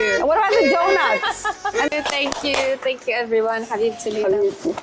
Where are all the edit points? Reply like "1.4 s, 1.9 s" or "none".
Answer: 1.9 s

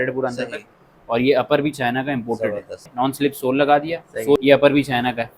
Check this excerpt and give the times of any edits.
2.8 s, 4.4 s

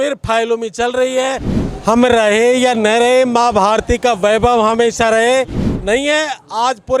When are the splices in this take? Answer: 1.6 s, 5.7 s

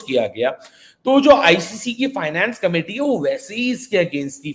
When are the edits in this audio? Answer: none

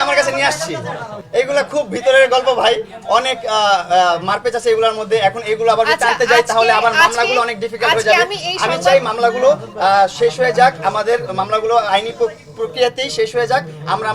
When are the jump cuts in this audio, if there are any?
none

